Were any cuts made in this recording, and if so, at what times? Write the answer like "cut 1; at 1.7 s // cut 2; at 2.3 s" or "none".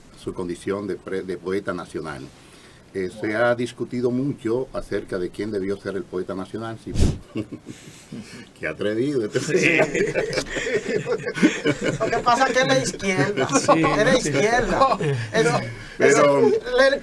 cut 1; at 7.0 s